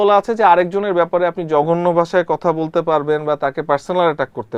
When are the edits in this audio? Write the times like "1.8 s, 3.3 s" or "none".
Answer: none